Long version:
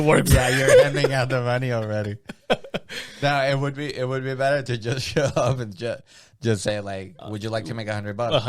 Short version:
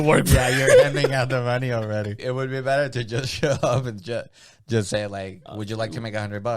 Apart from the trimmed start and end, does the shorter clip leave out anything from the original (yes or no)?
yes